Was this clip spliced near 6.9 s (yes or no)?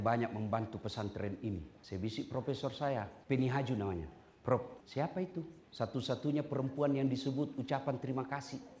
no